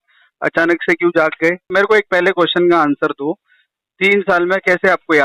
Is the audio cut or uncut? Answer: cut